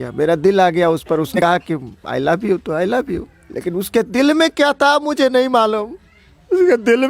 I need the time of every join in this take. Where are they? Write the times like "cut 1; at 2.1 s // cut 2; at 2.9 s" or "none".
cut 1; at 1.4 s